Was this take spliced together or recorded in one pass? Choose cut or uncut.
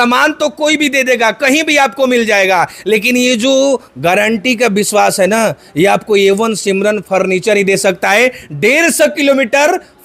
uncut